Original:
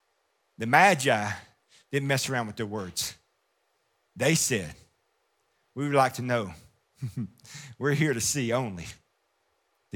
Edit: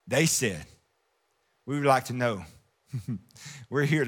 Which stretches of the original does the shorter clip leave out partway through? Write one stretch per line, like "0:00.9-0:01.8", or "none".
none

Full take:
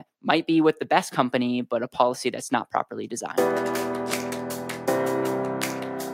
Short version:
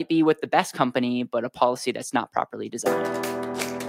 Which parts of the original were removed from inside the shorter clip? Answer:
0:03.1-0:03.3

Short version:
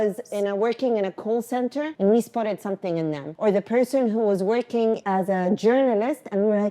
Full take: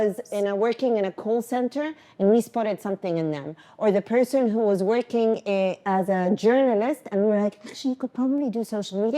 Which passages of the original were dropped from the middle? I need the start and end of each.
0:01.9-0:02.1
0:03.5-0:03.7
0:05.4-0:05.8

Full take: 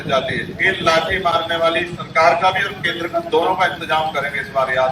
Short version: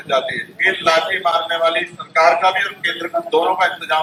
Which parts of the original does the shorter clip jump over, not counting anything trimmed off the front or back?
none

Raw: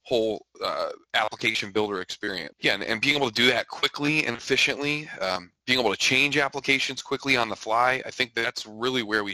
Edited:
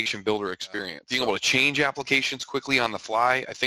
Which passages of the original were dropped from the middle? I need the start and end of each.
0:02.5-0:05.5

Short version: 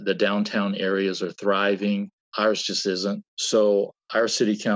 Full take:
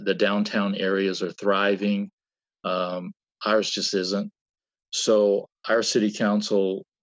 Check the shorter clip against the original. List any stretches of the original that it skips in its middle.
0:02.2-0:03.3
0:04.4-0:04.9

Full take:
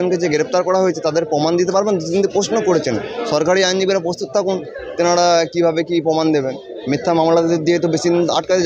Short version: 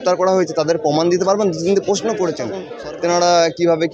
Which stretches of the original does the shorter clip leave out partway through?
0:03.1-0:04.6

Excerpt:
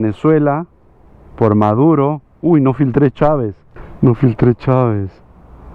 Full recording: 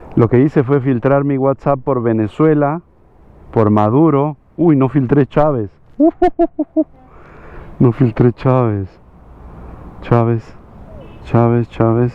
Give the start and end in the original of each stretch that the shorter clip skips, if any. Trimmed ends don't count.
0:05.8-0:07.4

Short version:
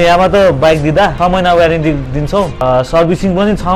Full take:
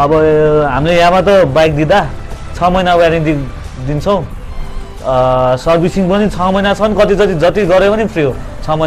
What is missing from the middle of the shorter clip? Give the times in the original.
0:02.1-0:02.6
0:04.0-0:05.4

